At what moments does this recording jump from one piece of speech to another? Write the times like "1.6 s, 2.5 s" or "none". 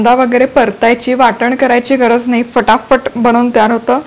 none